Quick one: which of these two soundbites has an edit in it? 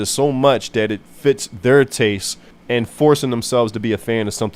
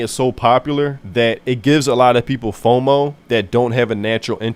first; 1 cut; at 2.5 s

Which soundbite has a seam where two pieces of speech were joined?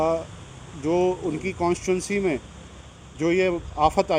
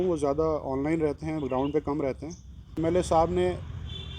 second; 1 cut; at 2.7 s

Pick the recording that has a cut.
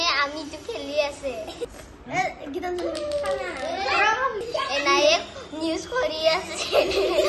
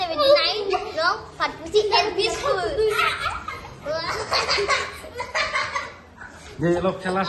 first; 2 cuts; at 1.6 s, 4.4 s

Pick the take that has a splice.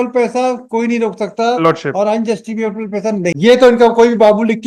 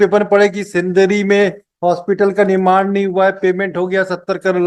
first; 1 cut; at 3.3 s

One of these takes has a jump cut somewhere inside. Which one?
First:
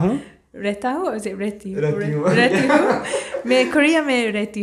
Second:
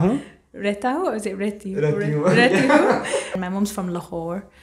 second; 1 cut; at 3.4 s

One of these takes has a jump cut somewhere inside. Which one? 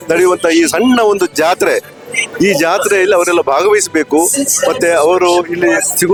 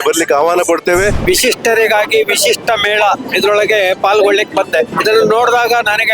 second; 2 cuts; at 1.2 s, 4.9 s

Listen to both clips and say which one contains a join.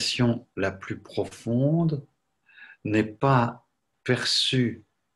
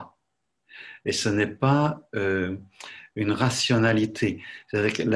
first; 1 cut; at 3.9 s

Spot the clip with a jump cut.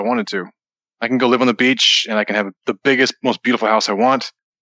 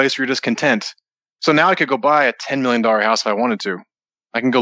first; 1 cut; at 2.5 s

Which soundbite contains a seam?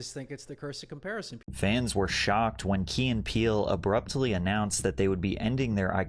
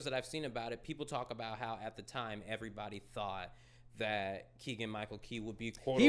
first; 1 cut; at 1.5 s

